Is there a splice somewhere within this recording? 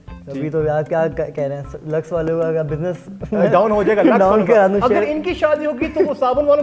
no; 0 cuts

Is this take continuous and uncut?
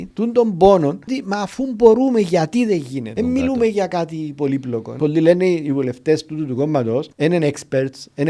no; 4 cuts; at 1.2 s, 3.1 s, 4.9 s, 7.1 s

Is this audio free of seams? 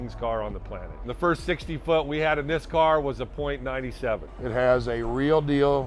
no; 2 cuts; at 1.1 s, 4.3 s

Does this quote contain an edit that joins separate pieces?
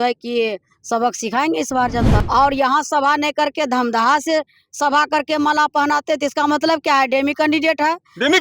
yes; 1 cut; at 2.2 s

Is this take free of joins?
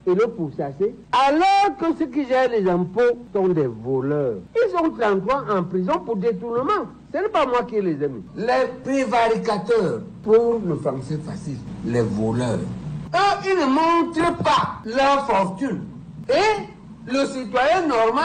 no; 3 cuts; at 1.0 s, 4.4 s, 8.2 s

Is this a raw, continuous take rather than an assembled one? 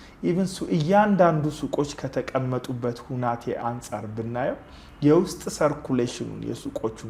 yes; 0 cuts

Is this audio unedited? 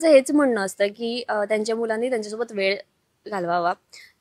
yes; 0 cuts

